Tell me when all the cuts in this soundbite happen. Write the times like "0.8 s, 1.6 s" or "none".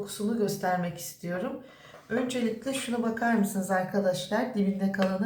none